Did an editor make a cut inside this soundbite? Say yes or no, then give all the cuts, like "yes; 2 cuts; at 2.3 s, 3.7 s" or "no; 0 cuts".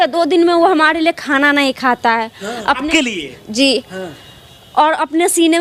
no; 0 cuts